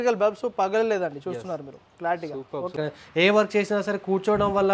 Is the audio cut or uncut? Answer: cut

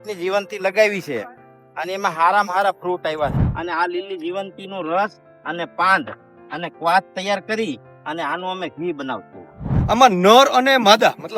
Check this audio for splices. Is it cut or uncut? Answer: cut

